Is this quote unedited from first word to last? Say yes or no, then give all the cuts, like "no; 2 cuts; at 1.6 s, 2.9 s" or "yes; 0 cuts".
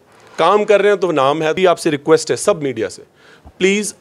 no; 1 cut; at 1.6 s